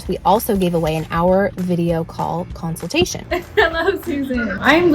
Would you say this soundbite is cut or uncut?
cut